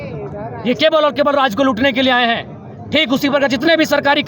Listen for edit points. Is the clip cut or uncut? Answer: uncut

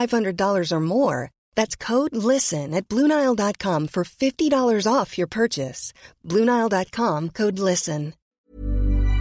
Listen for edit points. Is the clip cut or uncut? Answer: cut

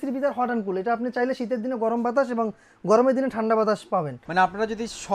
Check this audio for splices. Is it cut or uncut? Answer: cut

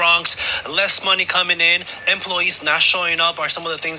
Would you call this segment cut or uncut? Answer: uncut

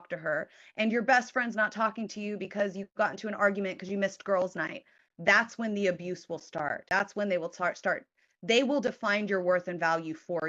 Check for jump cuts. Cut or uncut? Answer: cut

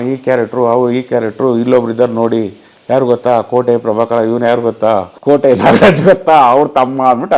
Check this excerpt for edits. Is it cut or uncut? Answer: cut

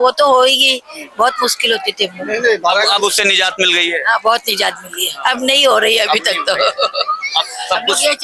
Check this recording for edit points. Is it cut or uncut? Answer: uncut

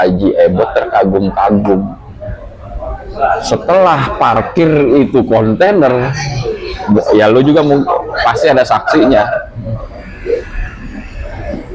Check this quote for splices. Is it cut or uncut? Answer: uncut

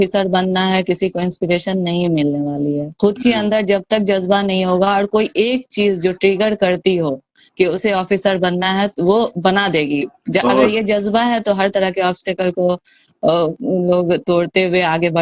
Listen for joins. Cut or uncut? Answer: uncut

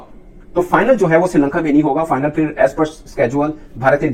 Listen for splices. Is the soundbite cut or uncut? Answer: uncut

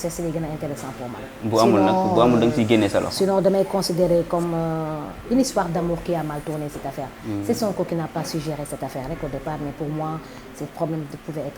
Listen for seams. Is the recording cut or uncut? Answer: uncut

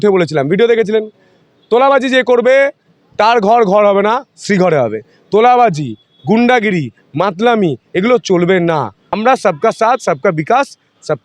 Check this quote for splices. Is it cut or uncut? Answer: cut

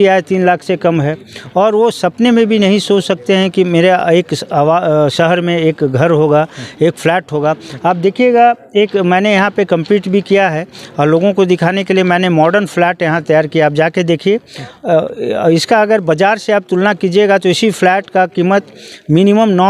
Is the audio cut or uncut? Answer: uncut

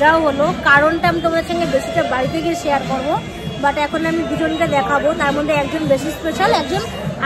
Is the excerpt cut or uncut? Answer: uncut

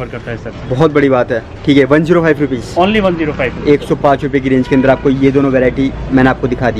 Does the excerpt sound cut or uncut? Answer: uncut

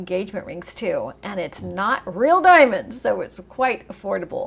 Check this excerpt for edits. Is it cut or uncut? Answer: uncut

